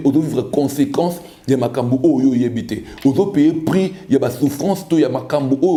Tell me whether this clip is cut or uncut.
uncut